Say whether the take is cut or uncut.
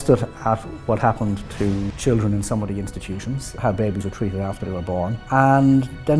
cut